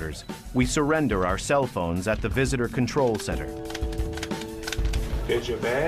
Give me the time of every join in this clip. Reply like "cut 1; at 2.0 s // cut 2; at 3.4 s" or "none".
cut 1; at 2.4 s